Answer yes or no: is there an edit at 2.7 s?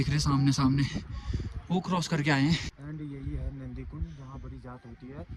yes